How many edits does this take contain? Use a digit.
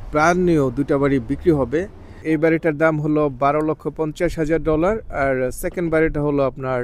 1